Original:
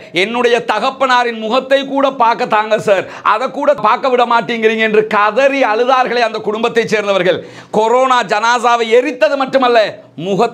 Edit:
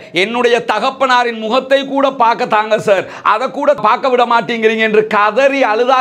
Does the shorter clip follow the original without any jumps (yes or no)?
yes